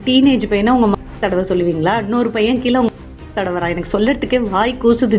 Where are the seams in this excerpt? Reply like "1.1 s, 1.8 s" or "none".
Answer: none